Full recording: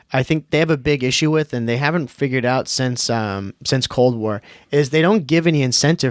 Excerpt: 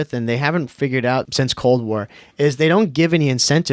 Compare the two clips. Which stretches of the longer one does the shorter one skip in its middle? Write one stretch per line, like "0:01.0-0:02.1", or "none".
0:02.7-0:03.6